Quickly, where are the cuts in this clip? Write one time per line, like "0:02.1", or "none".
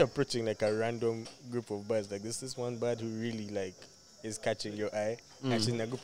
none